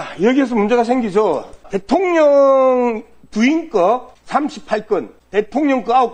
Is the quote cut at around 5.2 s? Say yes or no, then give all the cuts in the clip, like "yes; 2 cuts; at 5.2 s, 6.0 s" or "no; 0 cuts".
yes; 3 cuts; at 1.7 s, 4.1 s, 5.2 s